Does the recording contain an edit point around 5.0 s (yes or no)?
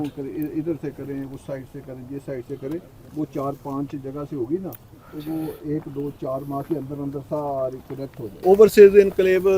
no